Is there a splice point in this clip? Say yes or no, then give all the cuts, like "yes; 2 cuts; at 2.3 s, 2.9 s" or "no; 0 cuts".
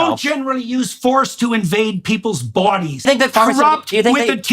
yes; 1 cut; at 3.1 s